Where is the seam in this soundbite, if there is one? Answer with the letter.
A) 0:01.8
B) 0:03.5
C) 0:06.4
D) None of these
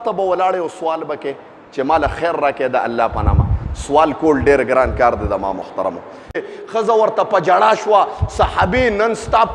C